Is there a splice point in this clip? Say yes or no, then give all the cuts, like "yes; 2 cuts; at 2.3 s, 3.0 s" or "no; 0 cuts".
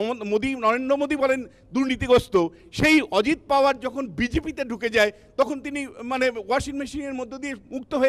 no; 0 cuts